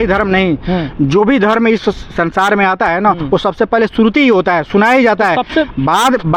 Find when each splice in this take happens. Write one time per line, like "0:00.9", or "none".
none

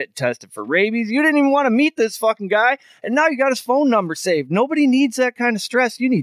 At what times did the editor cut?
none

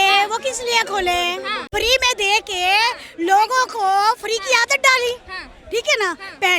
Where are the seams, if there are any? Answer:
0:01.6

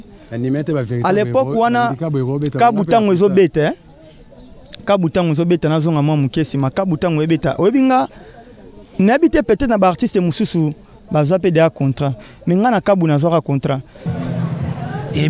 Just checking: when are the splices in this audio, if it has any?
0:14.0

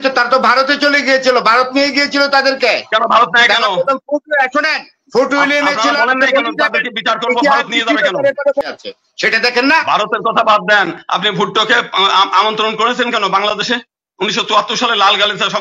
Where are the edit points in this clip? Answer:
0:08.7

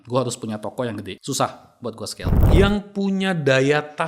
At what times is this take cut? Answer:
0:01.1
0:02.3

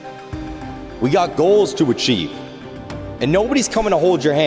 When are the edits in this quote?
0:01.0

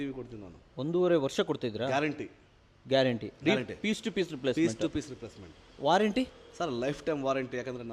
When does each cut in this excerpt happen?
none

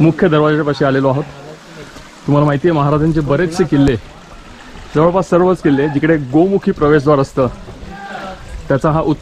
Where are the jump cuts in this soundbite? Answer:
none

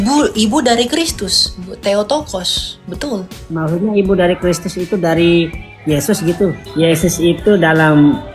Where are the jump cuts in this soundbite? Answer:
0:06.6

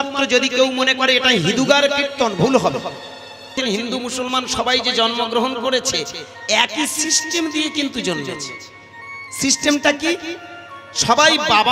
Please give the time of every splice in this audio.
0:03.5

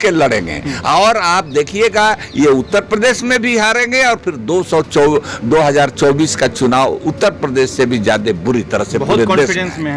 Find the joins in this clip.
none

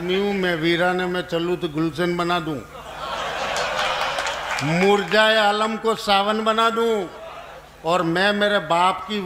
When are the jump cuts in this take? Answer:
none

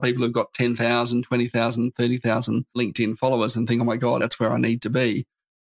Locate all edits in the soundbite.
0:02.8
0:04.2

